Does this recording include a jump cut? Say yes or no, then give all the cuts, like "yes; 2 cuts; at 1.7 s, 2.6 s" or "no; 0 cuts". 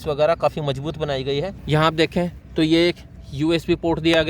yes; 1 cut; at 1.6 s